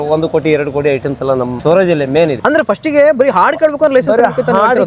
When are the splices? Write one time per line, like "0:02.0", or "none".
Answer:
0:02.4